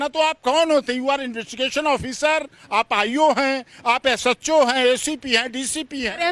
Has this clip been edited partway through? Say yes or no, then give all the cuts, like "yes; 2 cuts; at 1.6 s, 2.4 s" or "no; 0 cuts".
no; 0 cuts